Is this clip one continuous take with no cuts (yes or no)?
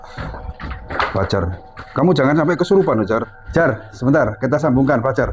no